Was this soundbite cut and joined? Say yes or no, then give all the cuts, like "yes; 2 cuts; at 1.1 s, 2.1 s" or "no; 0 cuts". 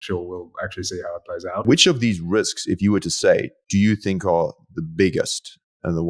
yes; 1 cut; at 1.7 s